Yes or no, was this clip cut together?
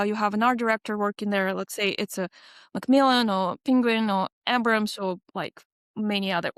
no